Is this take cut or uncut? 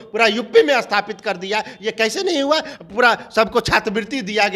uncut